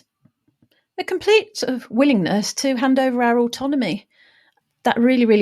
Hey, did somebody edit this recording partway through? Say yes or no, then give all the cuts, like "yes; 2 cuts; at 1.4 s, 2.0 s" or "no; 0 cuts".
yes; 1 cut; at 4.5 s